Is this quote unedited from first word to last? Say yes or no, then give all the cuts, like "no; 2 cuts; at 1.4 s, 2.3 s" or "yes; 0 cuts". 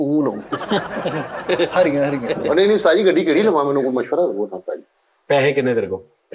yes; 0 cuts